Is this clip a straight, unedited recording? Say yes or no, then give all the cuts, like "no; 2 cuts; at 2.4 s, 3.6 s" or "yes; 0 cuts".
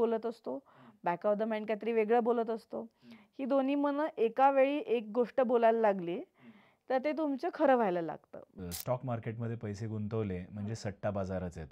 no; 1 cut; at 8.5 s